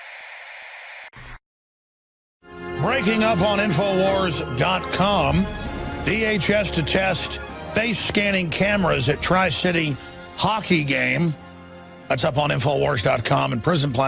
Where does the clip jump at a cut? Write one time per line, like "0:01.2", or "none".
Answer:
0:01.1
0:10.6